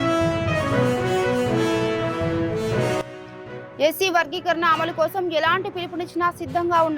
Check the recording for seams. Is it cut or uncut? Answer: uncut